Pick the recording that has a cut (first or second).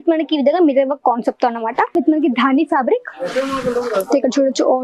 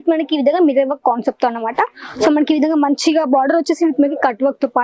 first